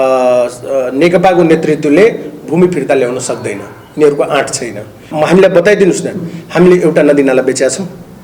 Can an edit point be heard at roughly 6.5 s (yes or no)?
no